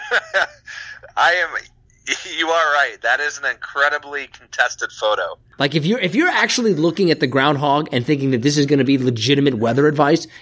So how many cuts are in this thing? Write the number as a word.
one